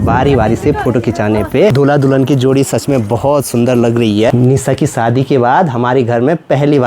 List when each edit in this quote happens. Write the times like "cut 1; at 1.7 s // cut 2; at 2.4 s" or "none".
cut 1; at 1.7 s // cut 2; at 4.3 s